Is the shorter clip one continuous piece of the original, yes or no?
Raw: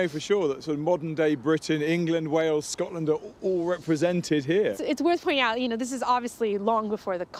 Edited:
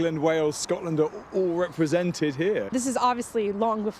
no